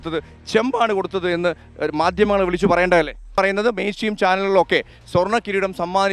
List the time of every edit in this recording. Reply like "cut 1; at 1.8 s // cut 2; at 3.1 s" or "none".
cut 1; at 3.3 s